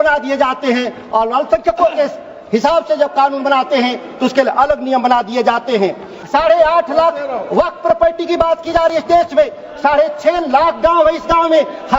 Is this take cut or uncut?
cut